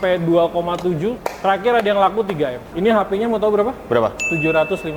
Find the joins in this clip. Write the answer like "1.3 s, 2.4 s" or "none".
1.3 s, 2.7 s